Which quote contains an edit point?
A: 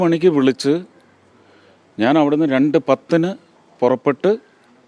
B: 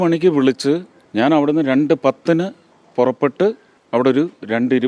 B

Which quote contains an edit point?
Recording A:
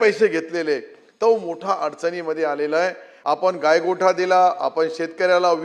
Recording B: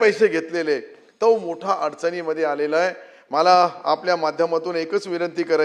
A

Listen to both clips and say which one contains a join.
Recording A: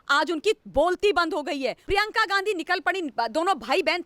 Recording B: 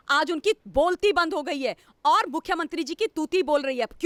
A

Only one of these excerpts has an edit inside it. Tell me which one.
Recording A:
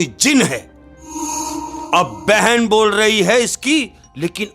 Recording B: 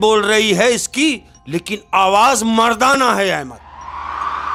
A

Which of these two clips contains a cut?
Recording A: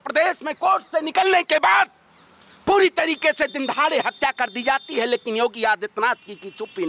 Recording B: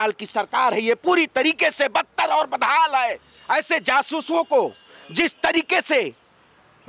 B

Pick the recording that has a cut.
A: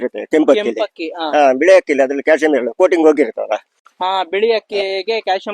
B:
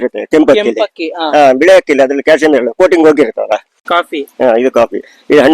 B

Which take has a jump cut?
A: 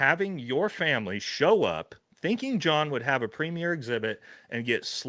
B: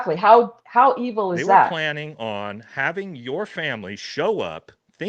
B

